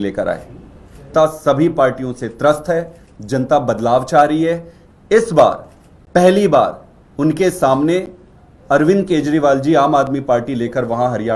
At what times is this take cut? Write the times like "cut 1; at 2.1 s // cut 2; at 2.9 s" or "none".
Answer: cut 1; at 1.1 s